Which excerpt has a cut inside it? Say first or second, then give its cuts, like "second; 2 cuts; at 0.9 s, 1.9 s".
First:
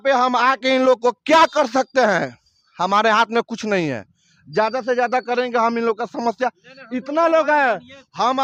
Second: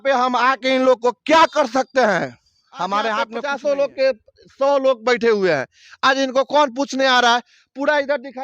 second; 1 cut; at 3.4 s